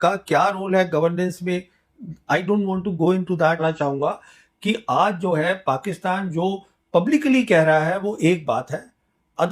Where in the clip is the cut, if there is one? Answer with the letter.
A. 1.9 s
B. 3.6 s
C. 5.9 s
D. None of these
B